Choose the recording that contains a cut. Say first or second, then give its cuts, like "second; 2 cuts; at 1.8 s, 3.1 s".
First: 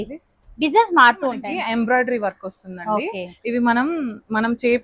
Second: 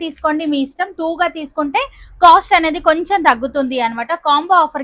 first; 1 cut; at 1.4 s